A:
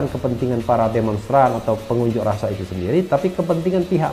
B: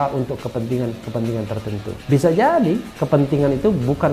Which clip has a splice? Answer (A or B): B